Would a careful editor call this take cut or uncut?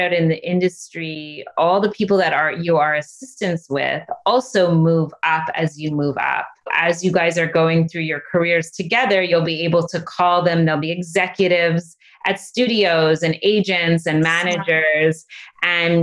cut